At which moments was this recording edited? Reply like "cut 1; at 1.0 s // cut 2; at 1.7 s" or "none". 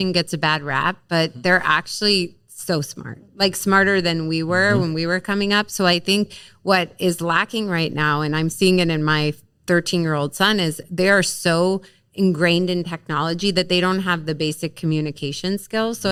none